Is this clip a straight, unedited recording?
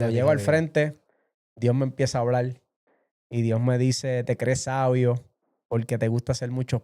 yes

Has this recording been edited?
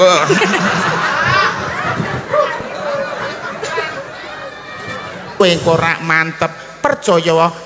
yes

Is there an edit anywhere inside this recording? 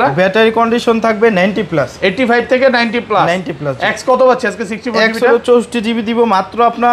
no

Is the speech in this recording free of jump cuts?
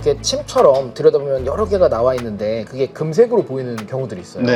yes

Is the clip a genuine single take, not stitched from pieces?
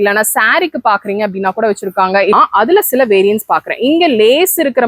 no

